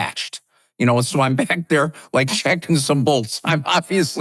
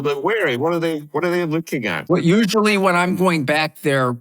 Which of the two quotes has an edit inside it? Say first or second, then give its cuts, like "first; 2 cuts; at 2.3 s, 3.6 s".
second; 1 cut; at 2.1 s